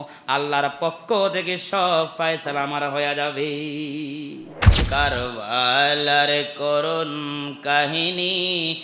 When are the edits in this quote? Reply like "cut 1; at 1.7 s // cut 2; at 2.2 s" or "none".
cut 1; at 4.7 s